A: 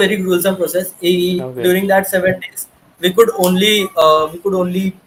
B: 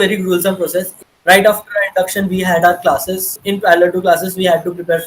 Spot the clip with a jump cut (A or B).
B